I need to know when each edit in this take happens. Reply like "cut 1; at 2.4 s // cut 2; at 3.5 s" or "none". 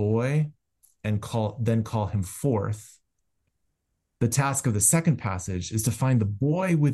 none